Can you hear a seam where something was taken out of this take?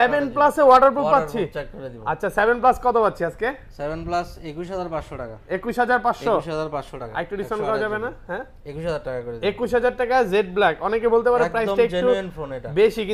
no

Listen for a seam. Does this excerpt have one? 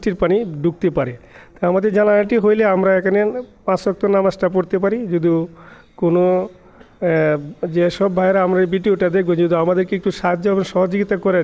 no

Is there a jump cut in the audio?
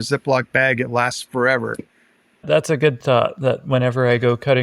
yes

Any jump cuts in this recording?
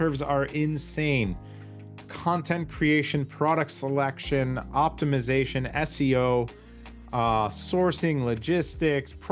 no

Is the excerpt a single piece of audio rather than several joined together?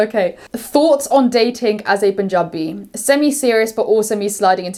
yes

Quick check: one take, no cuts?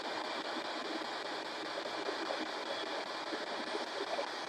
no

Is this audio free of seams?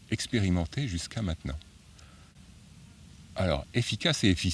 yes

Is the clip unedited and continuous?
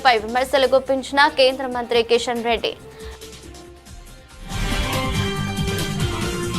no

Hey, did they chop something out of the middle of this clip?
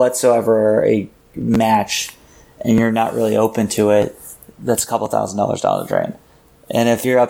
no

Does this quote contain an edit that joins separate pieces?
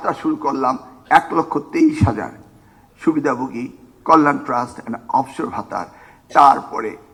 no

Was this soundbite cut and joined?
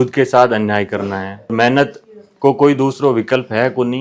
yes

